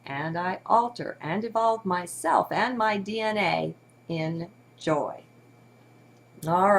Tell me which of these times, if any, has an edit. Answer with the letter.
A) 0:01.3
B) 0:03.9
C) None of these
A